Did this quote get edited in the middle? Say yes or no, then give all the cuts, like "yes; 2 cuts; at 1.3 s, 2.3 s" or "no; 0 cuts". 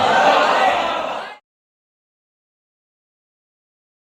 no; 0 cuts